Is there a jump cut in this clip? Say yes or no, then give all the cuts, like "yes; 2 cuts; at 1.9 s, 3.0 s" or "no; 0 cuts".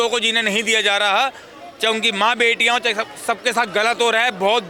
no; 0 cuts